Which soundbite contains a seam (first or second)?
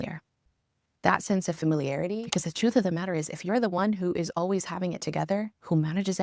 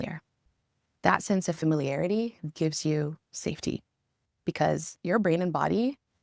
first